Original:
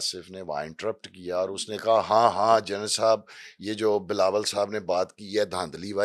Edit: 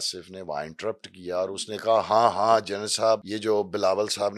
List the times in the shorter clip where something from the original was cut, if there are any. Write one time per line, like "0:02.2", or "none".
0:03.3